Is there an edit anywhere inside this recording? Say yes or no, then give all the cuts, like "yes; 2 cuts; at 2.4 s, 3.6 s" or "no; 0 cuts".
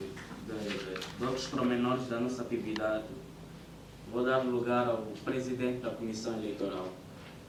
no; 0 cuts